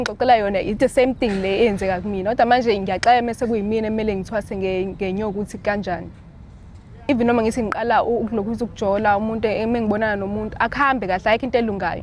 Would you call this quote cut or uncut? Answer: cut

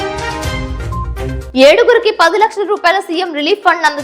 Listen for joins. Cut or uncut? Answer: uncut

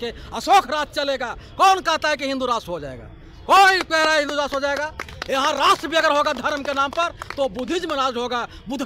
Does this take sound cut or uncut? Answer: uncut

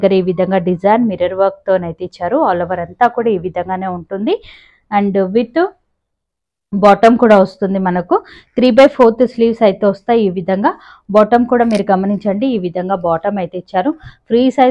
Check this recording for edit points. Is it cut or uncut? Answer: uncut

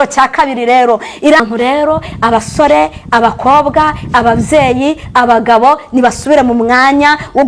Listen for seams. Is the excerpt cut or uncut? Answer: cut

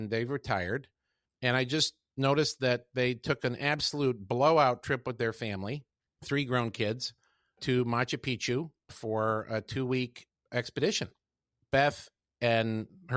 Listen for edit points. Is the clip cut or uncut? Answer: uncut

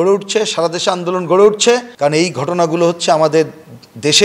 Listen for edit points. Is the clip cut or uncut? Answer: cut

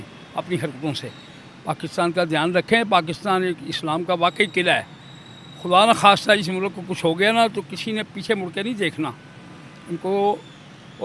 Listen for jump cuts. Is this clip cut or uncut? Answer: uncut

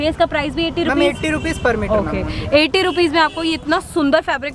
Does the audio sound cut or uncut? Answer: uncut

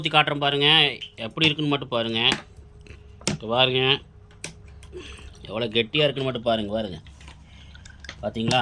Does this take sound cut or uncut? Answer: uncut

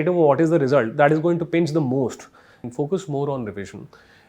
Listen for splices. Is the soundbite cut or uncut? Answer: cut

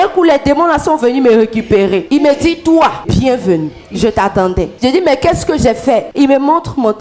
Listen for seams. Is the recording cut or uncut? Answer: cut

